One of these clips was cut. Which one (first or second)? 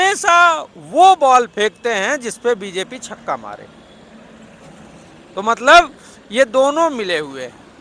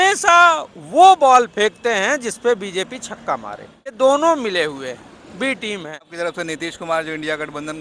second